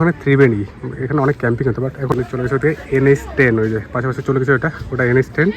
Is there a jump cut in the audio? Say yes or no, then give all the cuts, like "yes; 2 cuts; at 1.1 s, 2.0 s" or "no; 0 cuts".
yes; 1 cut; at 2.1 s